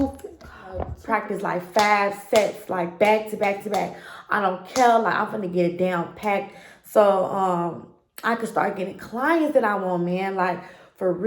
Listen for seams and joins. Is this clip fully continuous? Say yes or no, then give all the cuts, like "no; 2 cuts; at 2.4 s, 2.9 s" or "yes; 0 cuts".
no; 1 cut; at 0.9 s